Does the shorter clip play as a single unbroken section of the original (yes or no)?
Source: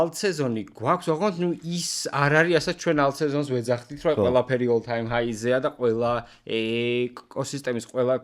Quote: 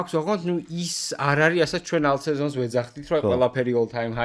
yes